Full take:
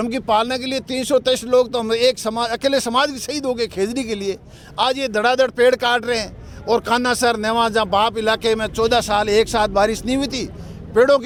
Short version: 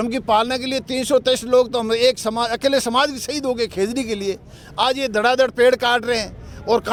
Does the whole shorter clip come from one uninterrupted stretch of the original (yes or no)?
yes